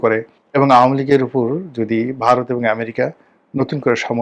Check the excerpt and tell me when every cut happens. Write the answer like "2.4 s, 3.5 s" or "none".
none